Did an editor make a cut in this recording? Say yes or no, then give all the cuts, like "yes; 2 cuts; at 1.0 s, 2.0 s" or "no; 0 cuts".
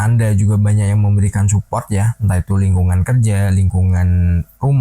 no; 0 cuts